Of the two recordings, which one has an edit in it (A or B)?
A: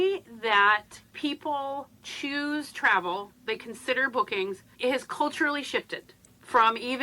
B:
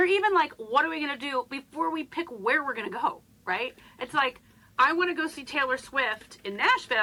A